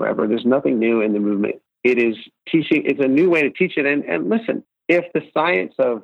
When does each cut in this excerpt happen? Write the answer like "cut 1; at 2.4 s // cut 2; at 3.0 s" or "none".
cut 1; at 1.7 s // cut 2; at 2.3 s // cut 3; at 4.7 s